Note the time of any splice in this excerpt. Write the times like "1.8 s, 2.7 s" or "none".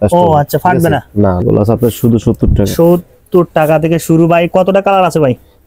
1.4 s